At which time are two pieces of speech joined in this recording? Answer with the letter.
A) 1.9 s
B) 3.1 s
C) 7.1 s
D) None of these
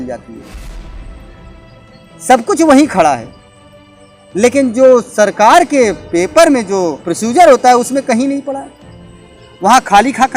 C